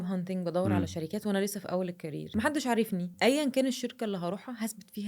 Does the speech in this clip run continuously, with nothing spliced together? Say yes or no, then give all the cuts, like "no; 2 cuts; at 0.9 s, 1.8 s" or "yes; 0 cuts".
no; 2 cuts; at 2.3 s, 3.1 s